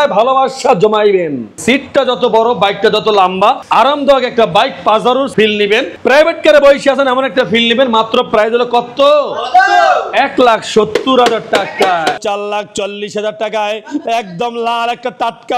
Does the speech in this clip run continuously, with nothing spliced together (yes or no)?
no